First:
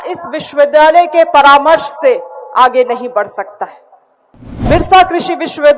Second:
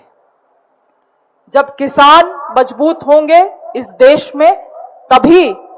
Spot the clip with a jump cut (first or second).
first